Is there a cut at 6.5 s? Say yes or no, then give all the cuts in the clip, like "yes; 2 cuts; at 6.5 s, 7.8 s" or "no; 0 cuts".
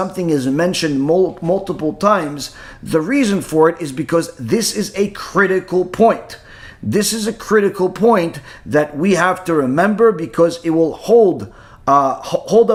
no; 0 cuts